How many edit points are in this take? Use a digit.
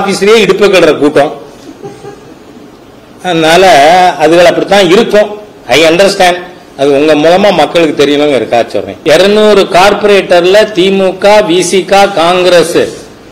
1